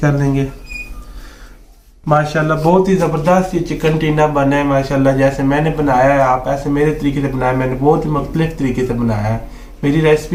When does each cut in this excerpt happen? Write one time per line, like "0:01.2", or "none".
none